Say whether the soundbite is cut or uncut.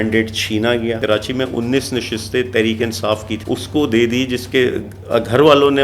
cut